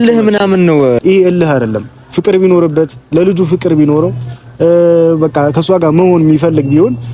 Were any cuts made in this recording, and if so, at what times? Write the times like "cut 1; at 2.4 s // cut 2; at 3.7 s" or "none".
cut 1; at 1.0 s